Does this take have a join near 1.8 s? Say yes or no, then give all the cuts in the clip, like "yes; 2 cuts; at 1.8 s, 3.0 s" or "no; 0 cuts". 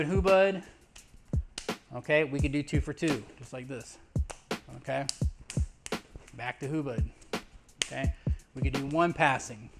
no; 0 cuts